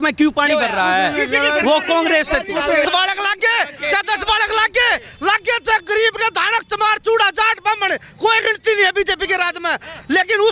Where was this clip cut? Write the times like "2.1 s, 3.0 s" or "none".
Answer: 2.8 s